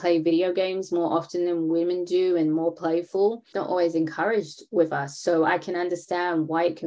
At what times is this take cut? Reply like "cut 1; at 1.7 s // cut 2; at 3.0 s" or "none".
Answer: cut 1; at 3.5 s